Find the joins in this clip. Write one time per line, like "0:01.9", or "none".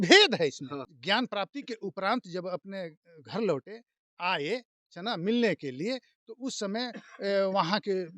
0:00.9